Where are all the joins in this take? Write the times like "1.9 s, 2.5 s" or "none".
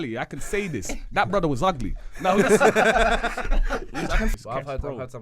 4.3 s